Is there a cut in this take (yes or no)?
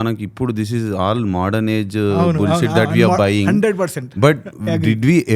no